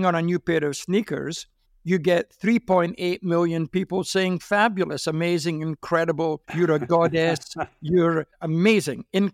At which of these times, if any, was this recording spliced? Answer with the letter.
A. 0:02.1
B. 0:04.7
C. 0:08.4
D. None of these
C